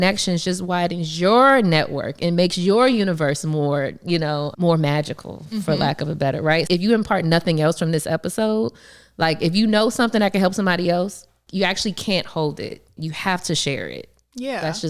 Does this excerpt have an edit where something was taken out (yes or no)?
yes